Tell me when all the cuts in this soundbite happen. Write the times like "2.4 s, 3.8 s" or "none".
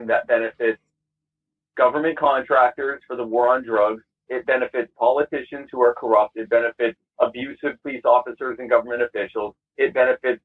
none